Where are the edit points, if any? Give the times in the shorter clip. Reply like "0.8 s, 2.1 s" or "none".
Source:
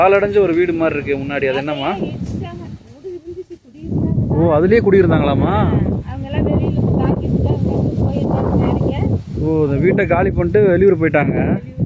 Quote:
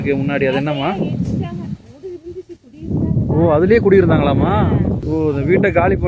5.0 s